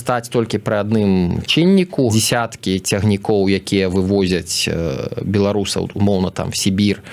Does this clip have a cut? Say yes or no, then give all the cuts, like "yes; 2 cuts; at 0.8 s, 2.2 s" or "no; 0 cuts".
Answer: yes; 1 cut; at 2.1 s